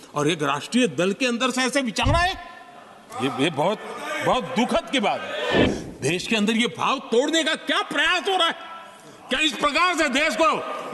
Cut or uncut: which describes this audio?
cut